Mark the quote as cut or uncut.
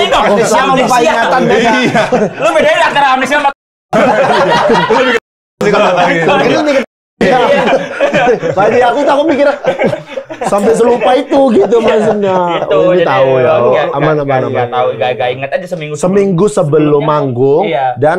uncut